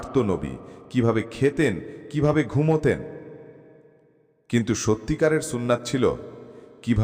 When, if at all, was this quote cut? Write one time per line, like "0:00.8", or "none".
none